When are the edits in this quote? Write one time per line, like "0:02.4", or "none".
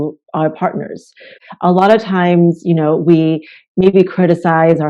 0:01.4